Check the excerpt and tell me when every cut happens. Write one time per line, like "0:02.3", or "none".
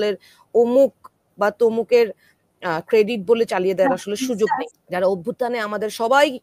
0:04.7